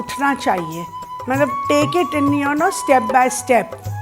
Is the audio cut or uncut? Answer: uncut